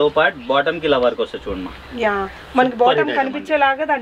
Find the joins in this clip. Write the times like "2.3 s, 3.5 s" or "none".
none